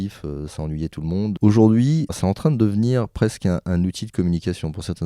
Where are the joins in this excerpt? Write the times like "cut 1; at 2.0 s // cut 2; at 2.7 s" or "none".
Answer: cut 1; at 1.4 s // cut 2; at 2.2 s